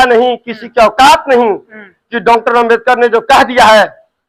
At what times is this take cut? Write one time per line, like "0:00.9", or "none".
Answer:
none